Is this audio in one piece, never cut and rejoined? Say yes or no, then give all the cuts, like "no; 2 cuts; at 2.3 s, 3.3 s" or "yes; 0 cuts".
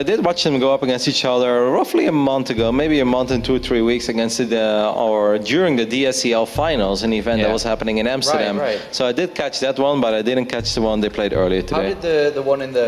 yes; 0 cuts